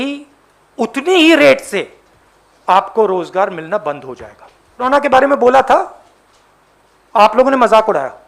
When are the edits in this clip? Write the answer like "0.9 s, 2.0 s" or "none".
4.8 s